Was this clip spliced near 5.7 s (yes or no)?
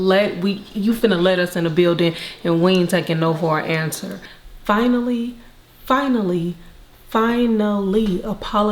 no